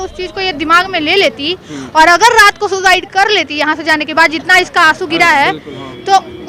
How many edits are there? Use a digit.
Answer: 0